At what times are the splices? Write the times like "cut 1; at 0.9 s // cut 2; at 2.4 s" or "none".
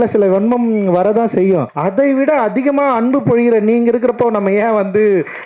cut 1; at 1.7 s